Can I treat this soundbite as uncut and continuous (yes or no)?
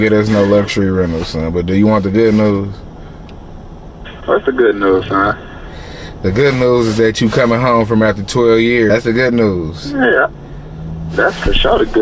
no